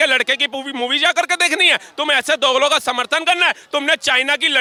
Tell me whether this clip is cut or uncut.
uncut